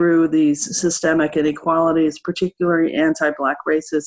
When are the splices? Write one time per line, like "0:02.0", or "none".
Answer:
none

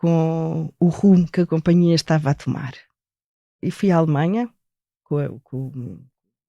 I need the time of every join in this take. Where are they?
0:03.5
0:05.0

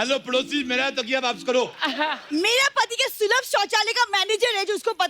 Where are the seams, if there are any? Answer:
0:02.2

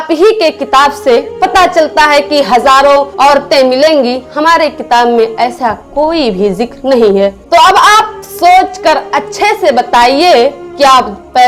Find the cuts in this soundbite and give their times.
none

